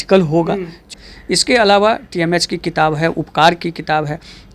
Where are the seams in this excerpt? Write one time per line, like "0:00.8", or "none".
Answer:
0:00.9